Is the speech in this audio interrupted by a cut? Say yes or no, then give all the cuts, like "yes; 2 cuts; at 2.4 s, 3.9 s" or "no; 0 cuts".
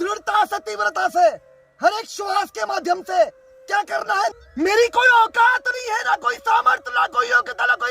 yes; 1 cut; at 4.4 s